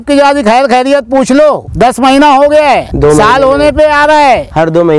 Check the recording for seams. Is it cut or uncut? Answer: cut